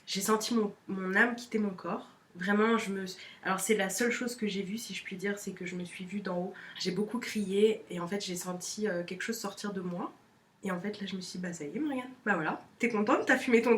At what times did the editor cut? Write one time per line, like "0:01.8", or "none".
0:06.7
0:07.8